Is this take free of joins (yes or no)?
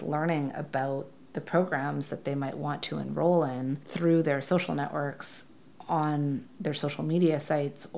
yes